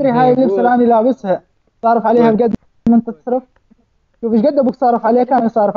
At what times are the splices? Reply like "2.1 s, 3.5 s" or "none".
none